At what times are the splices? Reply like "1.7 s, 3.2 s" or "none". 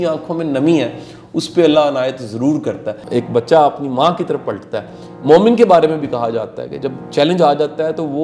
2.9 s